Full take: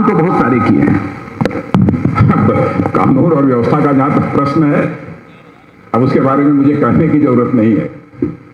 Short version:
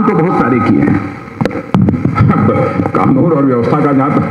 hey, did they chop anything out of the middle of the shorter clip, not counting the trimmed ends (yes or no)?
no